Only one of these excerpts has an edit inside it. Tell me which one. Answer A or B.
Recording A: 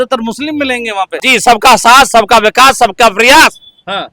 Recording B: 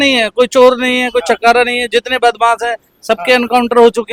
A